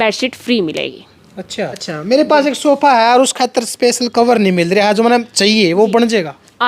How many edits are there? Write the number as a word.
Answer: one